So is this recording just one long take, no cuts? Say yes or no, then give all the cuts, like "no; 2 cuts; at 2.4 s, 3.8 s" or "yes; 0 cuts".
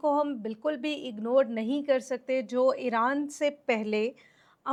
yes; 0 cuts